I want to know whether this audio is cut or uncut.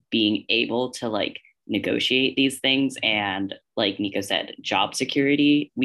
uncut